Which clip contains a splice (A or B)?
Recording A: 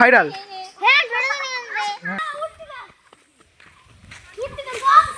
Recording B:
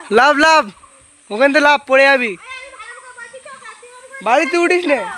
A